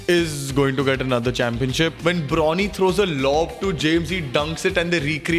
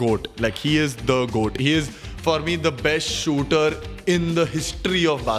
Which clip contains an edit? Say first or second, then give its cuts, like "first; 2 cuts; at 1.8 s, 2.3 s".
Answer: first; 1 cut; at 2.0 s